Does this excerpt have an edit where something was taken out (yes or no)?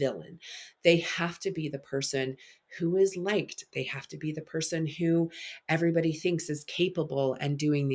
no